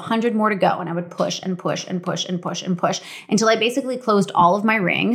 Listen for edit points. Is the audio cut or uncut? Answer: uncut